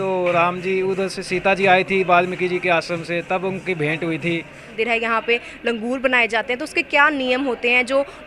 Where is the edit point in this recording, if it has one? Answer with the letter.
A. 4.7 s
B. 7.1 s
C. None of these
A